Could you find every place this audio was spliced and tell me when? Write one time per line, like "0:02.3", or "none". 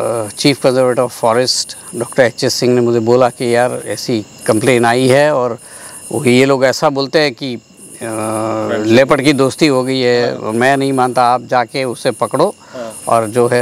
none